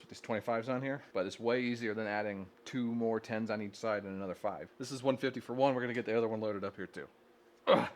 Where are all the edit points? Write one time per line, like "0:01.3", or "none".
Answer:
0:01.0
0:02.5
0:04.7